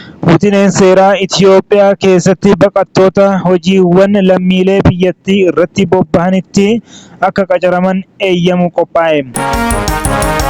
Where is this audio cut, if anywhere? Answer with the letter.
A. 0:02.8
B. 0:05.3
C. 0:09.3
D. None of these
C